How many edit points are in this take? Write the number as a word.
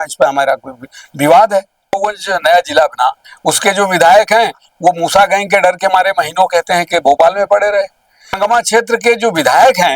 two